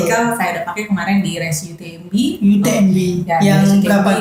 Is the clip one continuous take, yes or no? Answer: yes